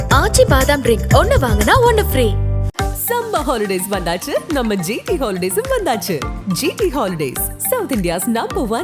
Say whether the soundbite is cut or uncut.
uncut